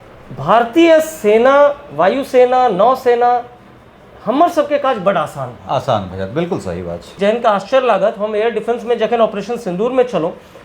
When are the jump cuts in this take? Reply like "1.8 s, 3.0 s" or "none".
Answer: 7.1 s